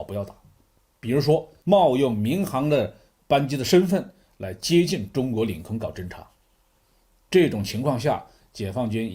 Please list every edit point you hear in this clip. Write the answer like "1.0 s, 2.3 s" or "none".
1.6 s